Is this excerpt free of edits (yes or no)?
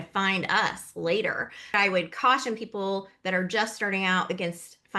no